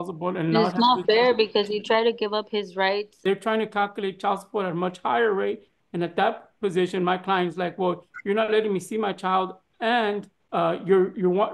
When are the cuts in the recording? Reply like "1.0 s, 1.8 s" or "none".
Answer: 3.2 s, 10.3 s